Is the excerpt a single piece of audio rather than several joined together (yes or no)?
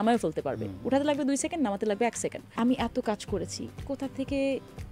no